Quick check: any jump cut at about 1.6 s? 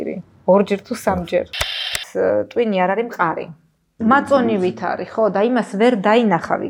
yes; 2 cuts; at 1.6 s, 3.8 s

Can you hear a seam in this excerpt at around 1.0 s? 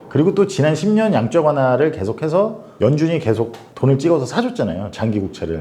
no; 2 cuts; at 2.6 s, 3.6 s

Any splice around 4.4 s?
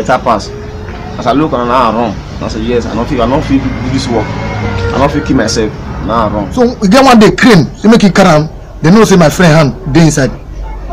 no; 1 cut; at 6.4 s

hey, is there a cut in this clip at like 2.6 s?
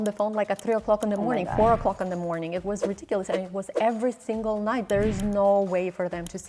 no; 1 cut; at 4.8 s

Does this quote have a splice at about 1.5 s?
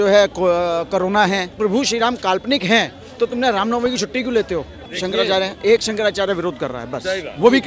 yes; 2 cuts; at 1.5 s, 4.8 s

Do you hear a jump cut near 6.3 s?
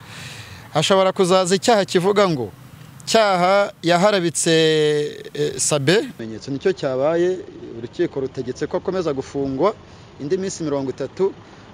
yes; 1 cut; at 6.3 s

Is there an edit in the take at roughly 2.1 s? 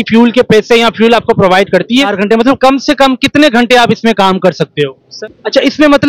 yes; 2 cuts; at 2.1 s, 5.0 s

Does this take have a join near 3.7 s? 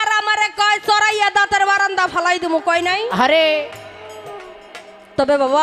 no; 0 cuts

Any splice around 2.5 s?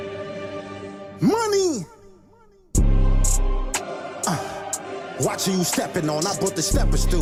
no; 0 cuts

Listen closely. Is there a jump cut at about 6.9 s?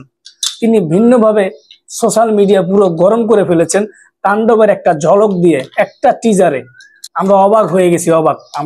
no; 0 cuts

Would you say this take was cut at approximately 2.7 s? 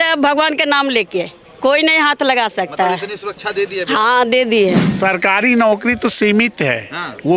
no; 1 cut; at 4.9 s

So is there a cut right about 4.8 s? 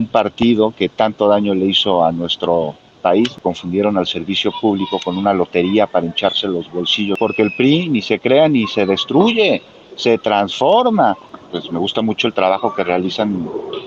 no; 3 cuts; at 3.3 s, 7.2 s, 11.3 s

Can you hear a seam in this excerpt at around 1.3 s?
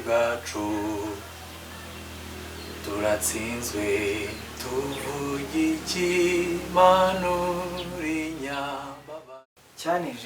no; 1 cut; at 9.3 s

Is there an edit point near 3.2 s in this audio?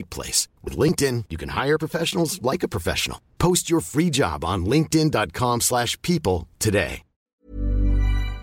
no; 1 cut; at 7.3 s

